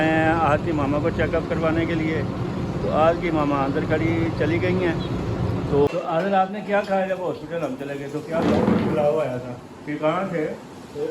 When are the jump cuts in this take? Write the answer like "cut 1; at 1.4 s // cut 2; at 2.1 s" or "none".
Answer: cut 1; at 5.9 s